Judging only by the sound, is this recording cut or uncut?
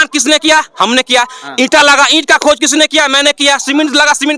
uncut